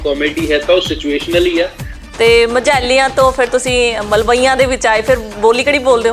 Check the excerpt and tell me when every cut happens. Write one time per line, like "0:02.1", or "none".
0:01.9